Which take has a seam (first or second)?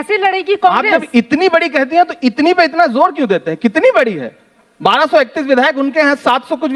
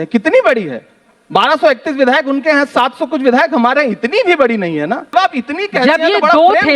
second